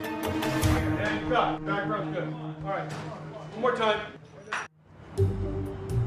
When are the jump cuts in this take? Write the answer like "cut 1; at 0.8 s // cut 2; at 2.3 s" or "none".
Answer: none

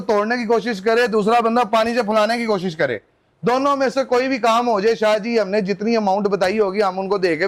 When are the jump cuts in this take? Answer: none

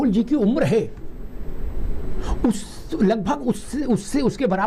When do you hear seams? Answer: none

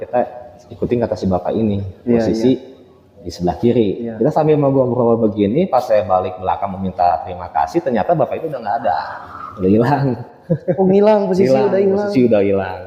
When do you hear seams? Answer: none

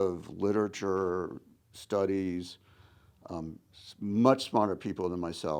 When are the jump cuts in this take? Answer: none

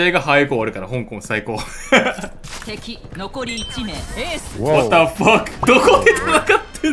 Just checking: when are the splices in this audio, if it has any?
cut 1; at 2.4 s // cut 2; at 5.6 s

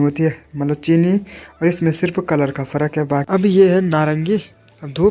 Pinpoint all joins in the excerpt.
cut 1; at 3.3 s

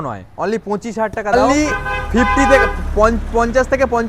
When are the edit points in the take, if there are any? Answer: cut 1; at 1.3 s

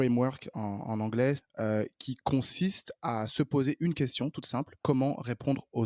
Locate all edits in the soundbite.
cut 1; at 1.4 s // cut 2; at 4.7 s

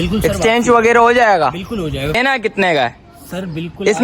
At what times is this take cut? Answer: cut 1; at 2.2 s

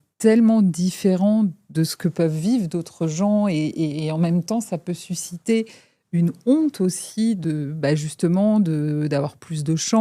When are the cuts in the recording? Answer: cut 1; at 7.4 s

